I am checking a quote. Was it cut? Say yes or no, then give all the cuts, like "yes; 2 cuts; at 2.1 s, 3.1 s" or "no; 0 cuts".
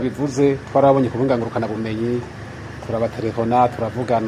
no; 0 cuts